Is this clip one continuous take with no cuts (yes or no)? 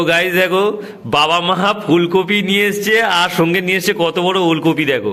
yes